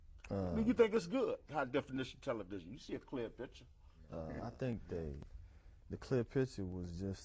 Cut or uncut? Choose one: cut